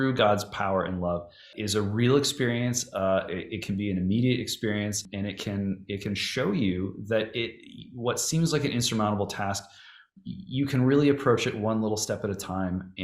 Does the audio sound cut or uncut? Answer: cut